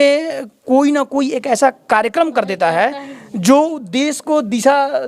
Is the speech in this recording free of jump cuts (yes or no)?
yes